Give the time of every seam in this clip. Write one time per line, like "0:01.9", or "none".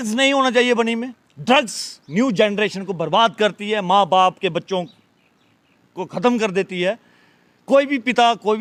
none